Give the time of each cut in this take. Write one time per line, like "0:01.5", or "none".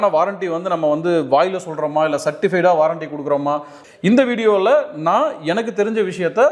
0:03.8

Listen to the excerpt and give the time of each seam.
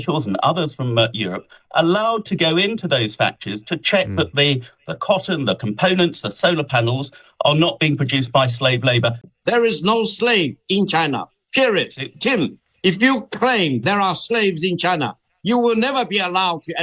0:09.2

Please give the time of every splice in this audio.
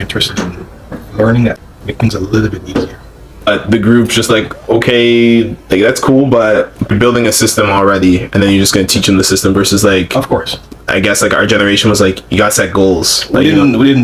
0:01.6
0:03.5
0:06.9

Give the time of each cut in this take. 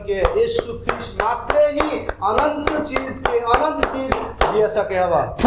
none

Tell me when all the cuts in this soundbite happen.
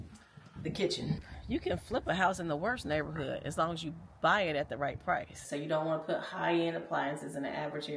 0:01.2
0:05.4

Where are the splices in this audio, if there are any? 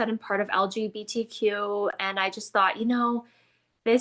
none

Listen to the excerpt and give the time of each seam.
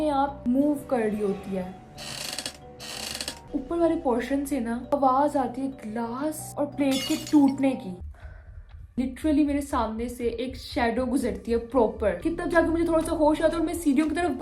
0:03.4
0:04.8
0:07.9
0:12.2

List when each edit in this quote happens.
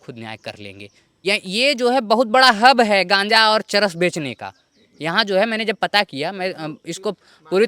0:01.0

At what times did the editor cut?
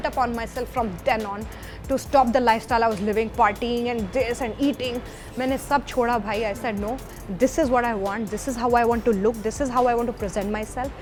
none

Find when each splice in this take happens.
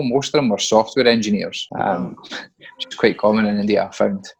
none

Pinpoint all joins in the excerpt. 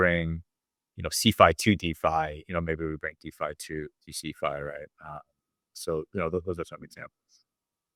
none

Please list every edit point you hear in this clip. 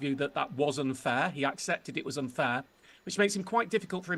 none

